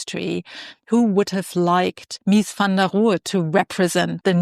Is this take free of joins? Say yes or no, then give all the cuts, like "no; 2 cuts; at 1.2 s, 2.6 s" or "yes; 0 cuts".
no; 1 cut; at 2.1 s